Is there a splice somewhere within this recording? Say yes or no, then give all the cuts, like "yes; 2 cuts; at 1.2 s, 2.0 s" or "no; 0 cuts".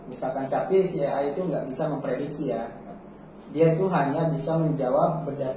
no; 0 cuts